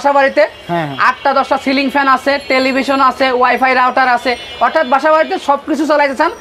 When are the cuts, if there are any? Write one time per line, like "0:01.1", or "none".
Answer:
none